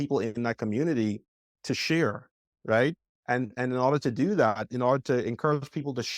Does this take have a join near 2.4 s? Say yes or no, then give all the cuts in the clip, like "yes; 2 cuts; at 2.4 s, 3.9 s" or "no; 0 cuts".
no; 0 cuts